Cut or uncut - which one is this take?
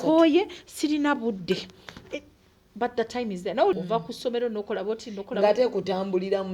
cut